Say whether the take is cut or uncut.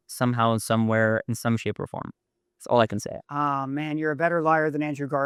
uncut